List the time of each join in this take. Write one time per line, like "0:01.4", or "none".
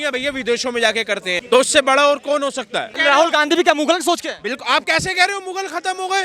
0:01.4
0:03.0

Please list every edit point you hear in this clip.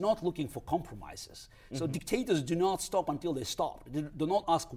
none

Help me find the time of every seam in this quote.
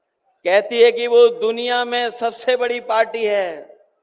none

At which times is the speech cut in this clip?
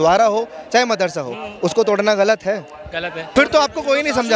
0:03.3

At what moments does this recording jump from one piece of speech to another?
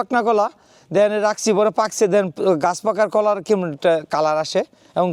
none

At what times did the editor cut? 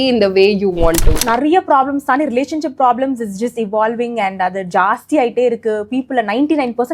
0:01.2

